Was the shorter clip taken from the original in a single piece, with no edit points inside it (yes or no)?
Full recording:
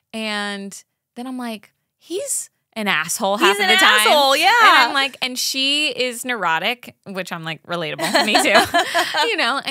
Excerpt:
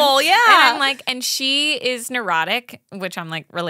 yes